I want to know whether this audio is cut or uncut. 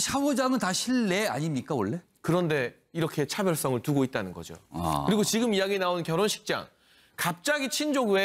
uncut